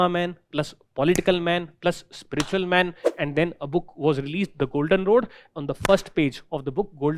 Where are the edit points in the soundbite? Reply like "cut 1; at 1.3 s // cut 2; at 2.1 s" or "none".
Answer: cut 1; at 3.0 s